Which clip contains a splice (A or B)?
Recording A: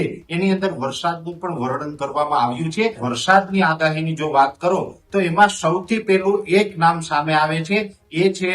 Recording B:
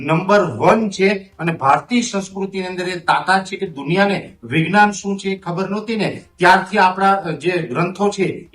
A